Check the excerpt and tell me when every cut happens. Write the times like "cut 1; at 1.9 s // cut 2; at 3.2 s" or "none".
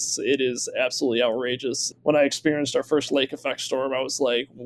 cut 1; at 1.9 s